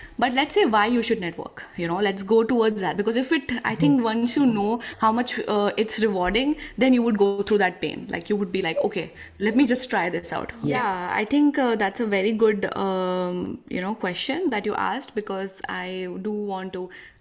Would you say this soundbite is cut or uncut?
cut